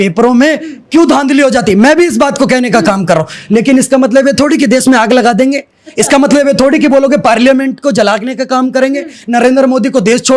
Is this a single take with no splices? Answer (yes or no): yes